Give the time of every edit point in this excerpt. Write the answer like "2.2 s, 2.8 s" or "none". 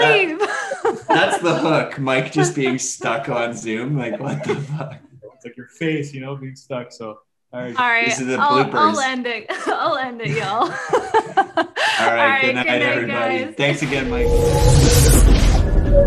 14.1 s

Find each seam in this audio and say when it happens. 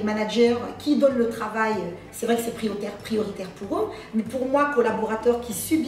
none

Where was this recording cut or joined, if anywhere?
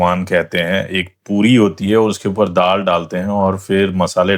none

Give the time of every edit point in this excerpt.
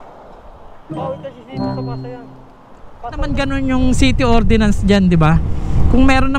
3.3 s

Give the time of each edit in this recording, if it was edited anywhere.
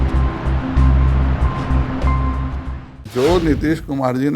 3.0 s

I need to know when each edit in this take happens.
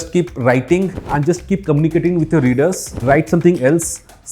1.0 s, 2.9 s

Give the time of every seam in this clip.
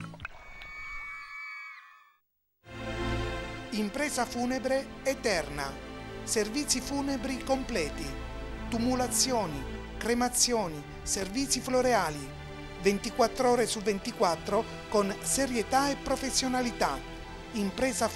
2.1 s

